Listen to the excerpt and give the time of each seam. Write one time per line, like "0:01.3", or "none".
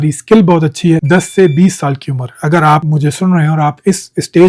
0:01.0
0:02.8